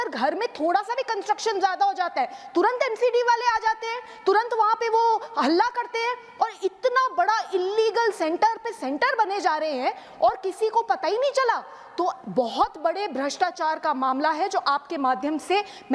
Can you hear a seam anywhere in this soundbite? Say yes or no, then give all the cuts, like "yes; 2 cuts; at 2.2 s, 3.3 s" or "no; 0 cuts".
no; 0 cuts